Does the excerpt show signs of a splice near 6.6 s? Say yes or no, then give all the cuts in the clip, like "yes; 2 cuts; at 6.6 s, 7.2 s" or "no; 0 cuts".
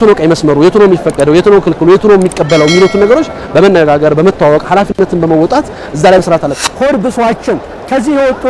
yes; 1 cut; at 6.6 s